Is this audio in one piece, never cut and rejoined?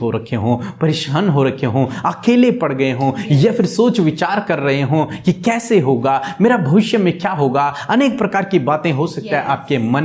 yes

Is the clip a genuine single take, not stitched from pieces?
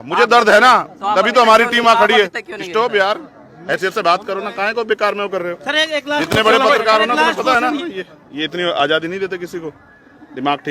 no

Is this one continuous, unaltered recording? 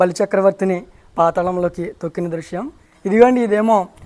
no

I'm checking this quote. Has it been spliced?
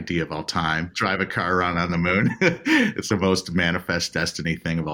yes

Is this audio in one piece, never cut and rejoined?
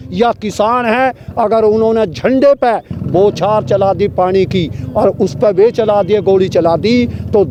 yes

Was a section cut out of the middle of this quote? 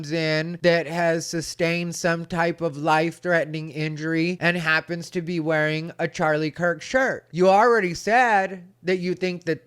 yes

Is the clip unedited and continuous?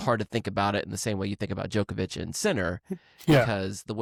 yes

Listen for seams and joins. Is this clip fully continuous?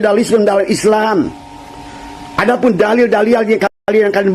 yes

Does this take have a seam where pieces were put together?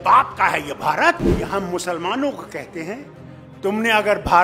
yes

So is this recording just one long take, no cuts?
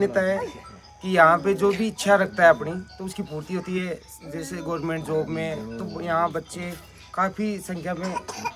yes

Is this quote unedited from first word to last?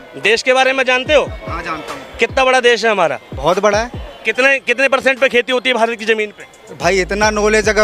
yes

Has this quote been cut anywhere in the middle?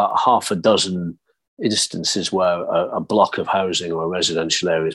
no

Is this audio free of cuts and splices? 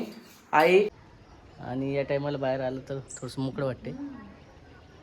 no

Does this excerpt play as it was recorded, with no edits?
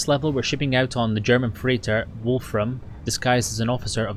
yes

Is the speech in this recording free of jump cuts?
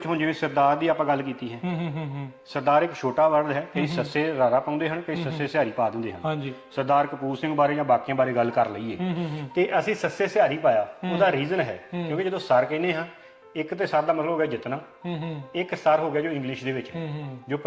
yes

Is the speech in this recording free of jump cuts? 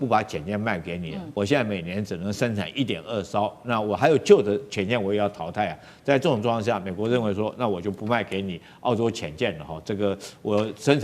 no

